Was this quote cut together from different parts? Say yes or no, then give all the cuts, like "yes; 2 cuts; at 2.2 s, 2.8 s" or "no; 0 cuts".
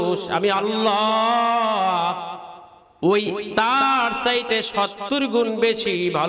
no; 0 cuts